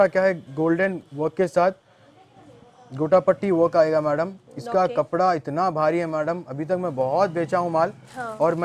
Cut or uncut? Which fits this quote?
uncut